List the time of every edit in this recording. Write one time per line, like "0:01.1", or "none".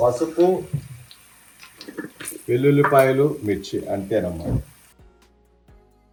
none